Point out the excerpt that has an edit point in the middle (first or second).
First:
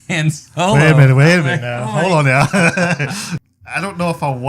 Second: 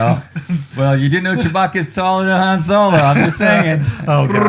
first